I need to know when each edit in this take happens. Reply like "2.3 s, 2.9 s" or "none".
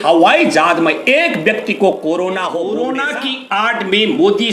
3.0 s